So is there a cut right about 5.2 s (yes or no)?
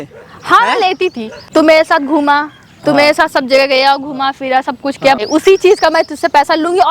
yes